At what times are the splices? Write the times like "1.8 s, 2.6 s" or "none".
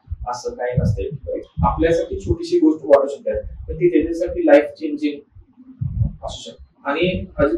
1.4 s, 6.6 s